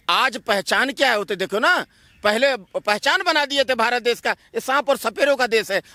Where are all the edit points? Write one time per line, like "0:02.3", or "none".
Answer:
none